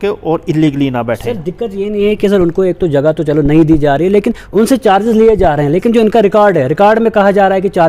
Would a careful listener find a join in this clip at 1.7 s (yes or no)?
no